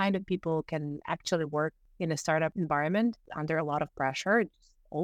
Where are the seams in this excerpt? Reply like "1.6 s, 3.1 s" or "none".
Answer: 2.3 s, 3.3 s

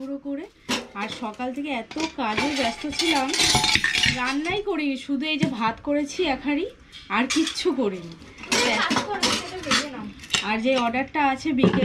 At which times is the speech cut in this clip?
none

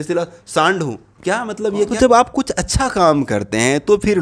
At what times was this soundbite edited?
1.9 s

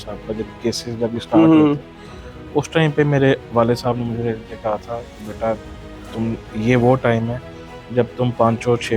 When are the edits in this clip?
none

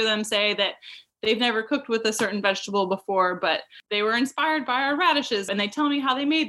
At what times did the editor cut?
3.8 s, 5.5 s

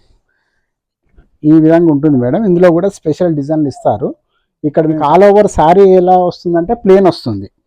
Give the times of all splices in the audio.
5.0 s

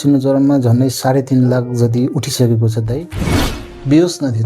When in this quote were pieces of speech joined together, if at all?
3.5 s

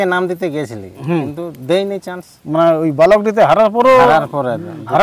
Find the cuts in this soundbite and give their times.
none

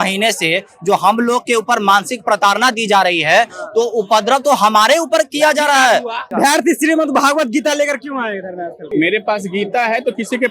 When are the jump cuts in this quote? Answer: 6.3 s, 8.9 s

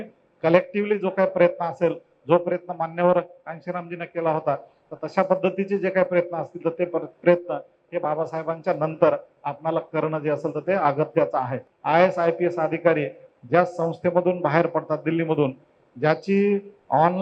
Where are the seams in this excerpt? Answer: 11.6 s

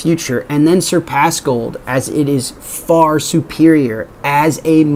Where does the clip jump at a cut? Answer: none

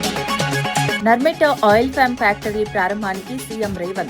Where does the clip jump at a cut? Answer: 0.9 s

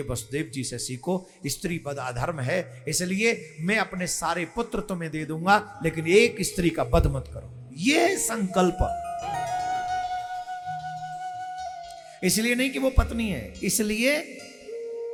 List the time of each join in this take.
none

